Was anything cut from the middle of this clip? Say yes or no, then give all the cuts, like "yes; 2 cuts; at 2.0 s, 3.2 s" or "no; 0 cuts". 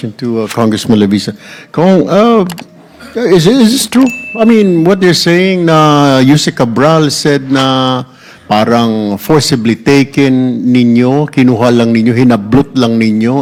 no; 0 cuts